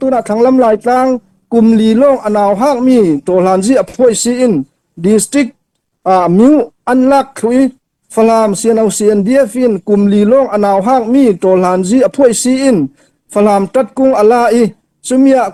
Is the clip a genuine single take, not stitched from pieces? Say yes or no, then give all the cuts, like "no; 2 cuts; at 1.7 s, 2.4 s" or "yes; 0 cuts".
yes; 0 cuts